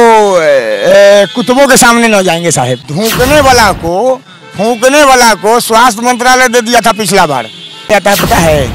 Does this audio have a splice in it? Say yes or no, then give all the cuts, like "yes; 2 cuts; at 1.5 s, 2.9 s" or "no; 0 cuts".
yes; 2 cuts; at 2.8 s, 7.9 s